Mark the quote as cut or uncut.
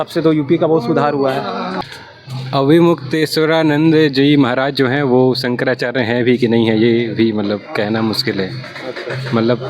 cut